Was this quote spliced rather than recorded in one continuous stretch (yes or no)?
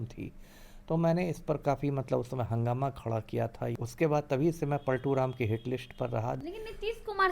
yes